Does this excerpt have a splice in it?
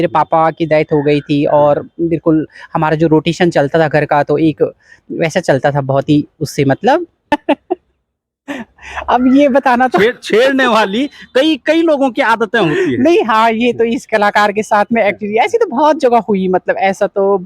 yes; 1 cut; at 7.3 s

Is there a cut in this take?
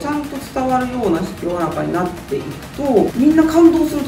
yes; 1 cut; at 3.1 s

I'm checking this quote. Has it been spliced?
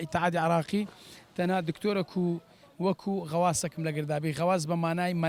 no; 0 cuts

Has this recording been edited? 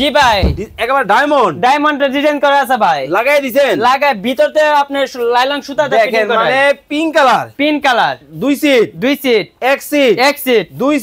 no; 0 cuts

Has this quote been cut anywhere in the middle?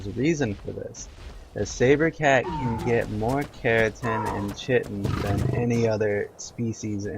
yes; 1 cut; at 4.3 s

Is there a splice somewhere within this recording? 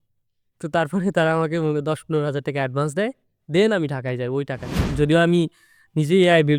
yes; 1 cut; at 4.8 s

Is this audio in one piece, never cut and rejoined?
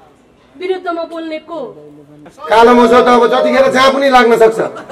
no; 1 cut; at 2.3 s

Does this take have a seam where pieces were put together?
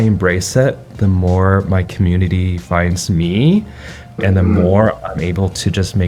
no; 0 cuts

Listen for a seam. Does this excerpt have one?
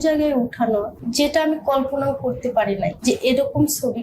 yes; 2 cuts; at 1.0 s, 3.0 s

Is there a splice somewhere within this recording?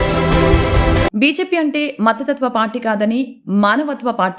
yes; 1 cut; at 1.1 s

